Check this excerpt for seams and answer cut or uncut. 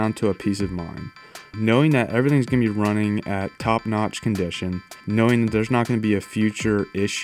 cut